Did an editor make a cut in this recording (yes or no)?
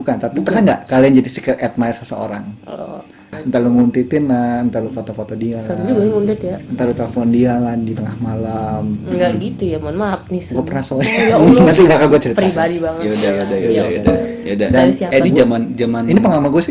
yes